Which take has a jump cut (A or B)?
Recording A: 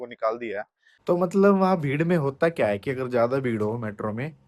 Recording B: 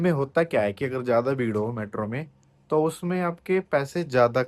A